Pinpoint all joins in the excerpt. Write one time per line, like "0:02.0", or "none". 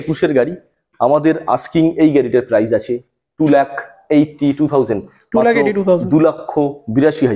none